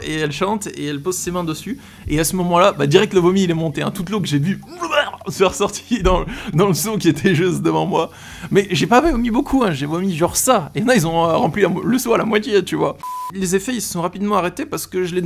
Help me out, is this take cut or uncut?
uncut